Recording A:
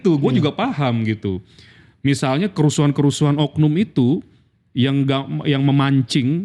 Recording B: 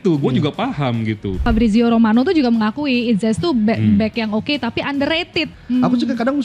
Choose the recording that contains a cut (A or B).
B